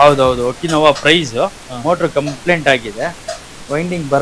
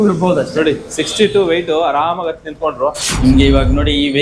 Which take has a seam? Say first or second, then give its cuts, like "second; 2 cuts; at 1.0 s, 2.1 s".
second; 1 cut; at 3.1 s